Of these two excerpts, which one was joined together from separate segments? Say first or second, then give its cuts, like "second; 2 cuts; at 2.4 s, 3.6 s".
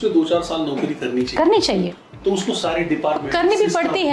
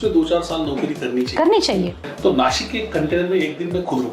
second; 1 cut; at 2.0 s